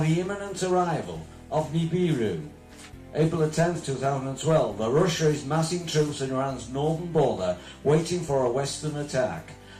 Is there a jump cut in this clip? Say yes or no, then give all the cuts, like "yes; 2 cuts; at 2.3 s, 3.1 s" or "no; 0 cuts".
yes; 1 cut; at 8.4 s